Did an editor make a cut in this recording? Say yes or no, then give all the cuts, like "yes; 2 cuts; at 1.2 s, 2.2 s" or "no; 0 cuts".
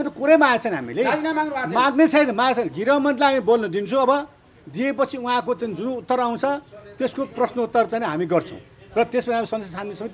no; 0 cuts